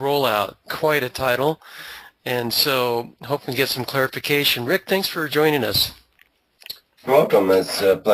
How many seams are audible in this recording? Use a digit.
1